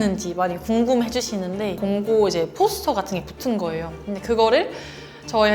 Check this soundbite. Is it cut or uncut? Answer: cut